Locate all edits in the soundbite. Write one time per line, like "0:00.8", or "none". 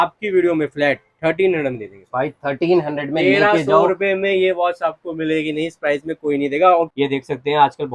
0:06.9

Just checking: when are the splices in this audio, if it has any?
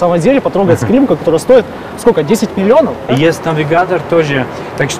0:03.1

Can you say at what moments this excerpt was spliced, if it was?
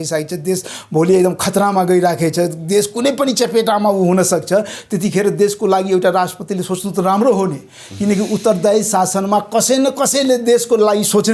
none

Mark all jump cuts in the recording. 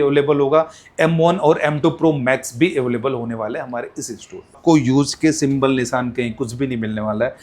0:04.6

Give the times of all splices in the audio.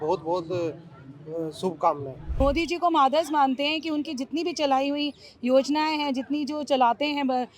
0:02.2

